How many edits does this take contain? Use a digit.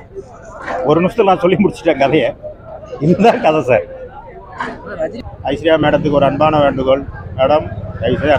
1